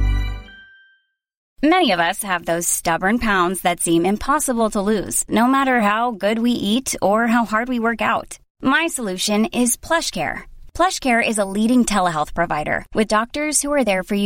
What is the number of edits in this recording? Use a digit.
1